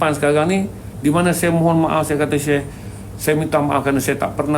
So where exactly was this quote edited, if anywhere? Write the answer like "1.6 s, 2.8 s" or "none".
0.9 s